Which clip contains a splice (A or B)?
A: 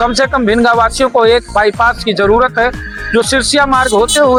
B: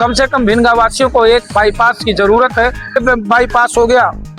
B